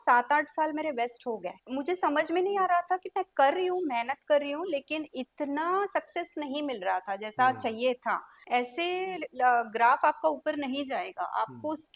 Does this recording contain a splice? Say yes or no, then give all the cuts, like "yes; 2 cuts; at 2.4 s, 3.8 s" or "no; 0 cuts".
yes; 1 cut; at 8.4 s